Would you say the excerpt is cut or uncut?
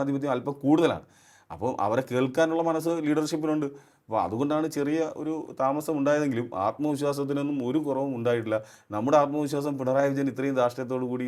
uncut